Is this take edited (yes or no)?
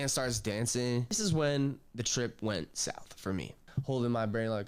yes